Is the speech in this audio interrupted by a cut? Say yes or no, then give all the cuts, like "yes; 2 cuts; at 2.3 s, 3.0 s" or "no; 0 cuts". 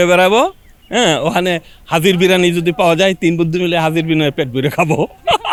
no; 0 cuts